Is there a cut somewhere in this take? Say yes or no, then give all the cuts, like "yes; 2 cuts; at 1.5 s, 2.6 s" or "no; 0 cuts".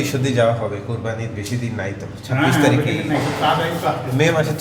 no; 0 cuts